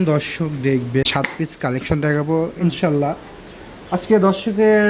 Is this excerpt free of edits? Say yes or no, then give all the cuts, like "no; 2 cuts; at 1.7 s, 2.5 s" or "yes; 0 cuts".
no; 1 cut; at 1.1 s